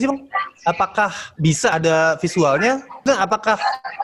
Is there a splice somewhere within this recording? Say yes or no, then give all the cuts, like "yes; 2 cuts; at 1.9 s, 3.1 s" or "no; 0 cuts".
yes; 2 cuts; at 1.7 s, 3.0 s